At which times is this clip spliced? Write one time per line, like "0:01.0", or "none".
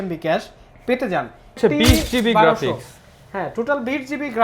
0:01.6